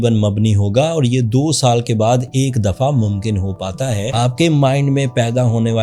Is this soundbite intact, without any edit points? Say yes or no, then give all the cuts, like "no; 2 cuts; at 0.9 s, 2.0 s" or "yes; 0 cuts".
no; 1 cut; at 4.2 s